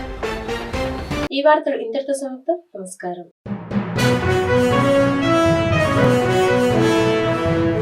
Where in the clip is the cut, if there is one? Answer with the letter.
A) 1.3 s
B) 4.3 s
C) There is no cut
C